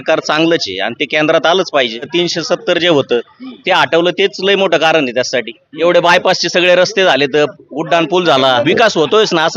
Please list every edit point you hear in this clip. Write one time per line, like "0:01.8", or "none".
0:02.1
0:05.6
0:08.6